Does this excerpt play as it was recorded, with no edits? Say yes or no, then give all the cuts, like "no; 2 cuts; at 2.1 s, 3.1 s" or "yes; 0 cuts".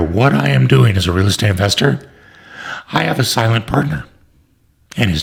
yes; 0 cuts